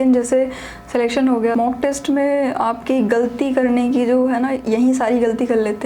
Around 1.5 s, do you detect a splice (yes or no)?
yes